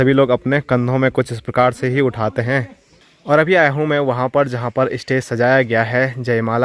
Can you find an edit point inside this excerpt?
no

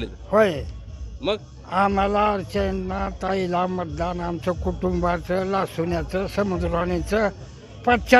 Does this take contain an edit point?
no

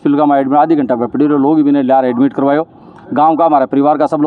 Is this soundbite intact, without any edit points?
yes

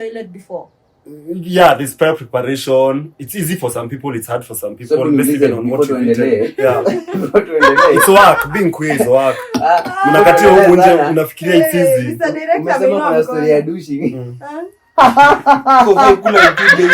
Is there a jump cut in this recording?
no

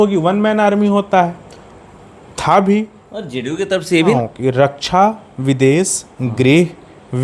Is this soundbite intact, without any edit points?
no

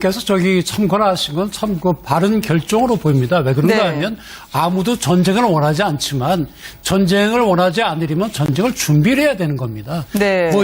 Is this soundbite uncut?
yes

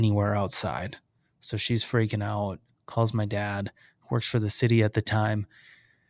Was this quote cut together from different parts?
no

